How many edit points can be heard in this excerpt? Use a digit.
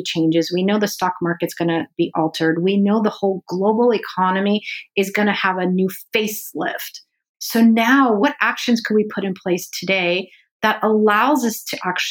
2